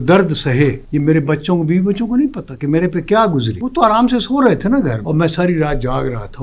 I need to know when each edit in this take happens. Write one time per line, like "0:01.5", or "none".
0:00.8
0:03.6
0:05.0